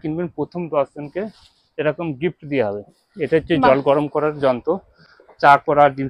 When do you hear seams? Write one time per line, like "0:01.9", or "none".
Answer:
none